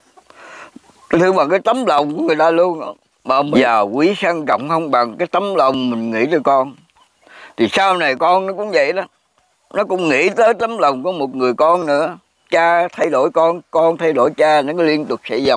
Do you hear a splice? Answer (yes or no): yes